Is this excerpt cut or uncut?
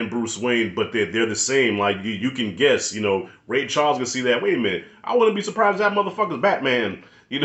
uncut